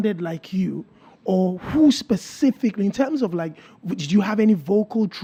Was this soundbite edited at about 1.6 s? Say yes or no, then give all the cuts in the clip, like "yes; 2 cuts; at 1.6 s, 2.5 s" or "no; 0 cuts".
no; 0 cuts